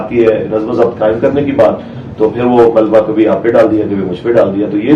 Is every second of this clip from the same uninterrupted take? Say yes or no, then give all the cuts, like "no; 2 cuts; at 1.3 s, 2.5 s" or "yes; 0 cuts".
yes; 0 cuts